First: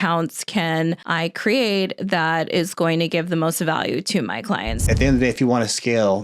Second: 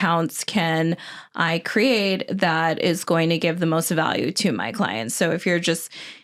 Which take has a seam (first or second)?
first